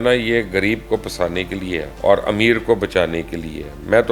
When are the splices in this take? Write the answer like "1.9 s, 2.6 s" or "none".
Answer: 1.9 s